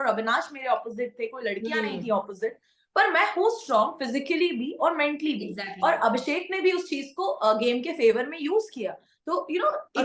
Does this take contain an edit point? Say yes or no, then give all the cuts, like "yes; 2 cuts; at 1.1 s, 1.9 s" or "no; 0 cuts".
no; 0 cuts